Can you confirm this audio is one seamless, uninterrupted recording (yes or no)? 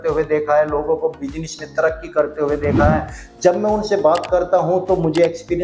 yes